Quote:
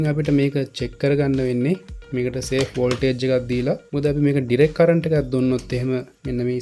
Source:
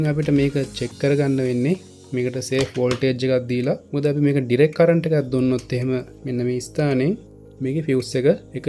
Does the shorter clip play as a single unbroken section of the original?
yes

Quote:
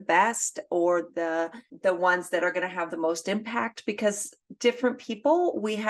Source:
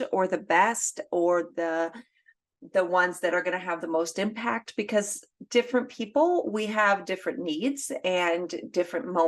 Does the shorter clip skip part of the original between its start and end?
yes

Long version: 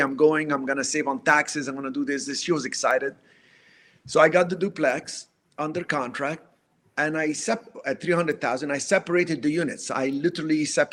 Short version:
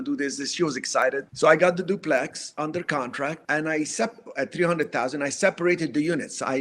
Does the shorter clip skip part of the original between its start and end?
yes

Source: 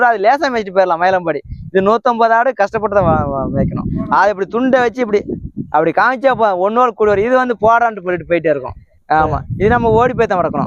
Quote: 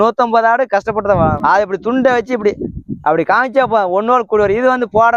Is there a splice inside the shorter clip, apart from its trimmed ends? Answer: yes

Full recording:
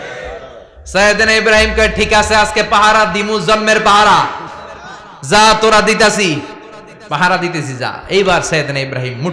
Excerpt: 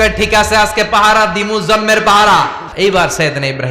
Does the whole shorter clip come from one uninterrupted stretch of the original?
no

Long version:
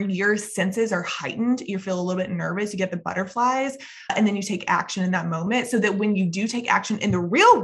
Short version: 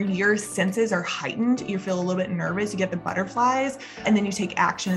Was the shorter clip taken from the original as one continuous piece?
no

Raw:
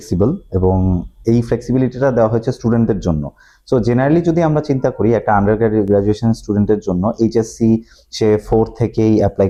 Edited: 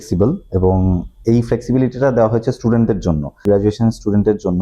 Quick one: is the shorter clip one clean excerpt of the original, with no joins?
no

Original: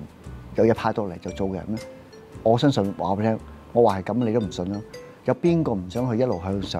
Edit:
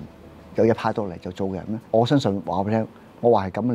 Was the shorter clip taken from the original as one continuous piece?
no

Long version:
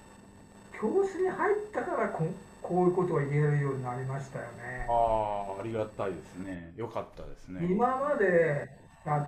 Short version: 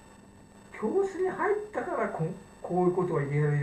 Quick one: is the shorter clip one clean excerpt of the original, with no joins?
yes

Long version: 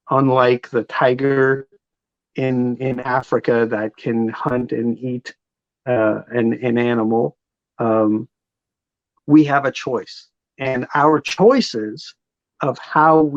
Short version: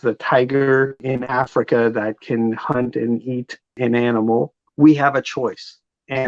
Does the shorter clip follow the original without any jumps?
no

